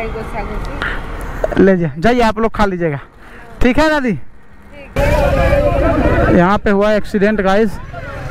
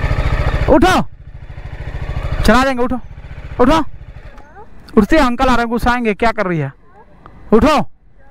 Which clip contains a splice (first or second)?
first